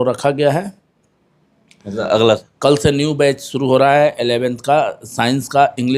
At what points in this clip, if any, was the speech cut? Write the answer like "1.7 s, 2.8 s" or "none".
2.5 s